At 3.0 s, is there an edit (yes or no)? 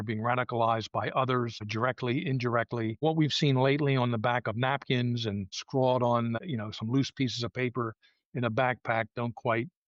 yes